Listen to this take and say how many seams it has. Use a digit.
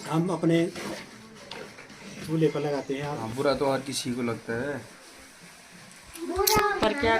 1